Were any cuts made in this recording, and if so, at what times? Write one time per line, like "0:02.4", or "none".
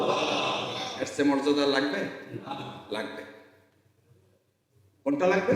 none